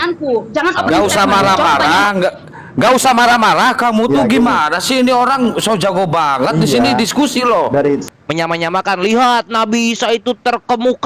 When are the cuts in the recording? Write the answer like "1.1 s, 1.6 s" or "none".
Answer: 8.2 s